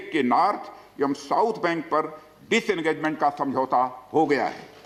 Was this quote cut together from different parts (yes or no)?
no